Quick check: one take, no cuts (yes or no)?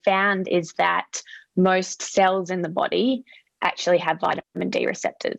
yes